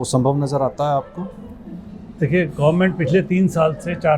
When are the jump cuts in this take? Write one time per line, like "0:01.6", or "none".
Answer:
none

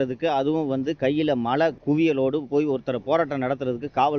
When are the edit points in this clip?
0:01.8

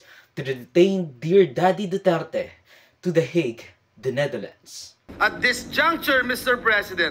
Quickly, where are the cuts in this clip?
0:05.0

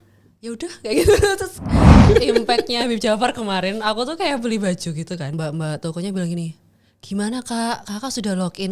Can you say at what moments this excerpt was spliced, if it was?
0:02.0
0:05.3

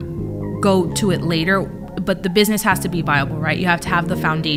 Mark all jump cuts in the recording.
none

